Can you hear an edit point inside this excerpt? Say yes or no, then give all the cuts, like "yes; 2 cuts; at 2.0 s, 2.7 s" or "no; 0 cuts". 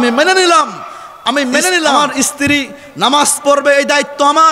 yes; 1 cut; at 2.0 s